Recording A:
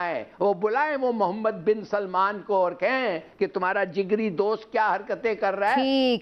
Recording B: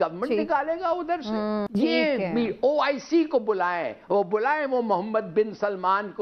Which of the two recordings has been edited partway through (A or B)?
B